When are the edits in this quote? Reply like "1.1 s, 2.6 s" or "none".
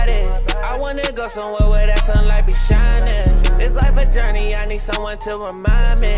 none